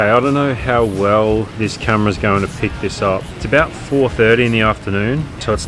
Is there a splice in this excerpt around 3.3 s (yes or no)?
yes